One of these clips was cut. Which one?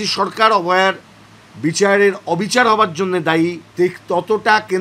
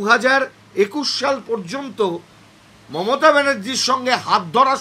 first; 1 cut; at 3.6 s

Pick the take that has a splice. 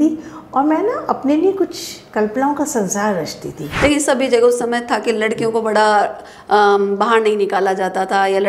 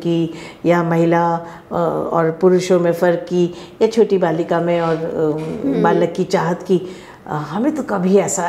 first; 1 cut; at 3.7 s

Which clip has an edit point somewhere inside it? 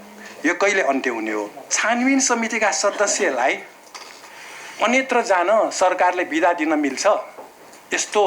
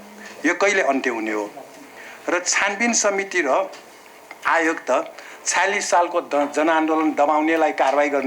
first; 1 cut; at 1.7 s

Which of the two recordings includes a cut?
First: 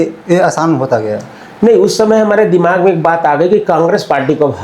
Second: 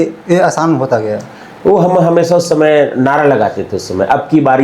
second; 1 cut; at 1.4 s

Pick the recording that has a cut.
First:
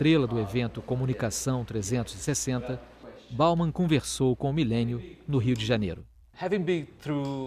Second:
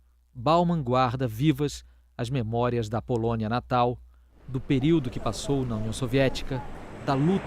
second; 1 cut; at 2.6 s

